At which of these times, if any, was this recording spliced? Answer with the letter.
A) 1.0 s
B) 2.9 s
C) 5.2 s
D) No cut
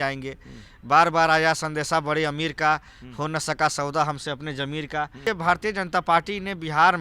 C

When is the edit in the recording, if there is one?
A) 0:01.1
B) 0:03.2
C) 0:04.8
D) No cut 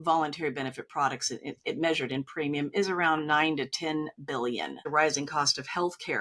C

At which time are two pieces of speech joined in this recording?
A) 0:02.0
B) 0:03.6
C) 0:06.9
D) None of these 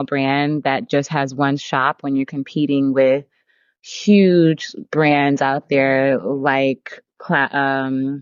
D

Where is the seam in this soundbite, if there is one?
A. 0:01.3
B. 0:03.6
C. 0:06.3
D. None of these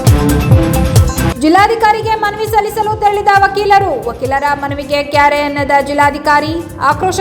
A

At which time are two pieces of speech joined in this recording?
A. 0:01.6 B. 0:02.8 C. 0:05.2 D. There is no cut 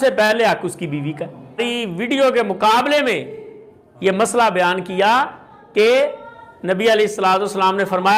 A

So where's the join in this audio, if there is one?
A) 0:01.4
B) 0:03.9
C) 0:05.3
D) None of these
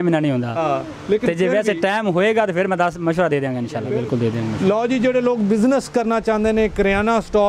B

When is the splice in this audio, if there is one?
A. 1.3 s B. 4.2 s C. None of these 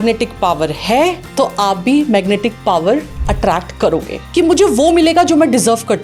B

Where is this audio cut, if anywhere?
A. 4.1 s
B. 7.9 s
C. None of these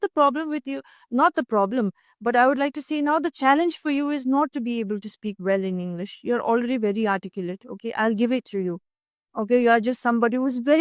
C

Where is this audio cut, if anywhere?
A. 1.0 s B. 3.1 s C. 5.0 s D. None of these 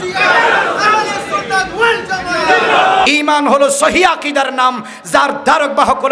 B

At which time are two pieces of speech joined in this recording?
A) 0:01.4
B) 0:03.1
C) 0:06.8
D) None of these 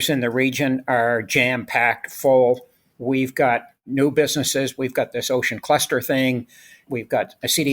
C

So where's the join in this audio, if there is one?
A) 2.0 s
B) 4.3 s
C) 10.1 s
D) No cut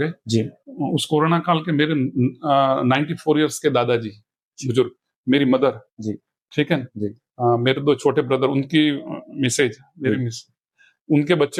D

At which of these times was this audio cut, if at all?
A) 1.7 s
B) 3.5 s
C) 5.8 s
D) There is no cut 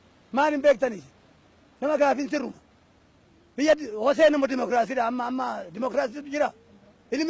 D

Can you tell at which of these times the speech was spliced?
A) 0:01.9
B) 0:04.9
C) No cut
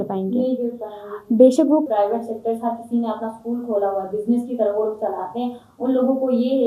A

